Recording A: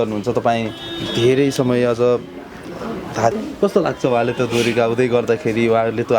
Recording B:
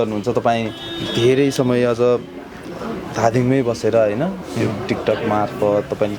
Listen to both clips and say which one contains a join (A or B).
A